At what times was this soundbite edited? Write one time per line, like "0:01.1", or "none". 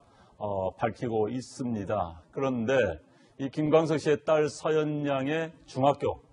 none